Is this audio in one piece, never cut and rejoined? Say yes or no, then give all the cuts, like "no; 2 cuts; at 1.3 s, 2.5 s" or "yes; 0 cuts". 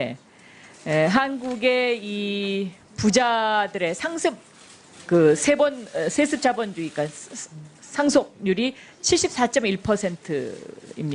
no; 1 cut; at 9.2 s